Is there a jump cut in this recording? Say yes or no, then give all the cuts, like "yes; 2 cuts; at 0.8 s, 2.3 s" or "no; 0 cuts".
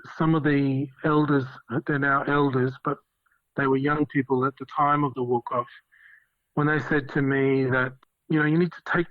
yes; 2 cuts; at 0.9 s, 8.0 s